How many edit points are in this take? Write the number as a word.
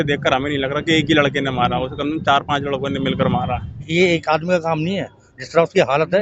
one